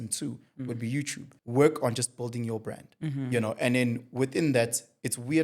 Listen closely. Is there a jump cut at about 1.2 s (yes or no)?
yes